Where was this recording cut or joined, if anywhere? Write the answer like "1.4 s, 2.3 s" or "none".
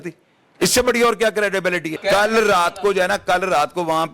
2.0 s